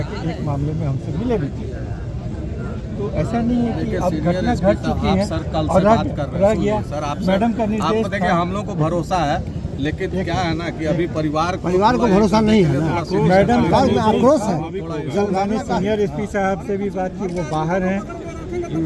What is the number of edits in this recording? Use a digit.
0